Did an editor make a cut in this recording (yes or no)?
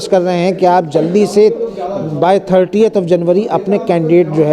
no